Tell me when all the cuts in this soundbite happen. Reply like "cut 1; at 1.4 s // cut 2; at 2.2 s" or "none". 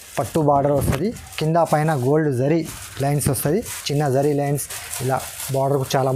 none